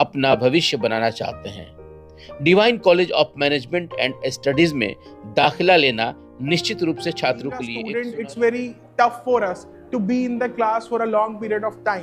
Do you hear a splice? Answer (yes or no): yes